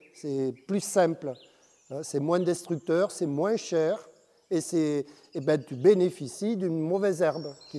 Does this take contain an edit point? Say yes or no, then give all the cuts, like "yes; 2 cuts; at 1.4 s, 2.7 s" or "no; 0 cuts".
no; 0 cuts